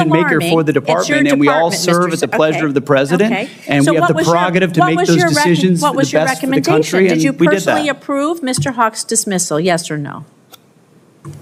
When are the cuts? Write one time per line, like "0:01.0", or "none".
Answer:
none